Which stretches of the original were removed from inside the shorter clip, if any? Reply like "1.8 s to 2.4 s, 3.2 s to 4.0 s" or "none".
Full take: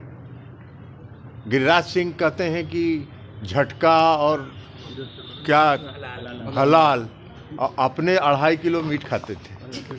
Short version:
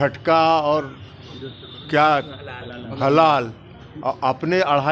none